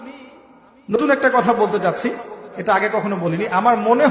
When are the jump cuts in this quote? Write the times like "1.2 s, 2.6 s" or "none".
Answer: 0.9 s